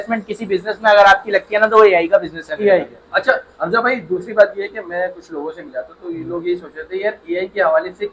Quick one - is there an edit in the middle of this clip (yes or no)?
no